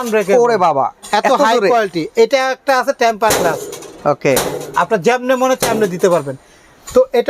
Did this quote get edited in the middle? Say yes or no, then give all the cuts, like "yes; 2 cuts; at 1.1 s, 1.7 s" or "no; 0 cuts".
no; 0 cuts